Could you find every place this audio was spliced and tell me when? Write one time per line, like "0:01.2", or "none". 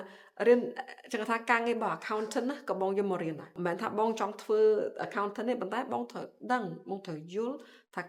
none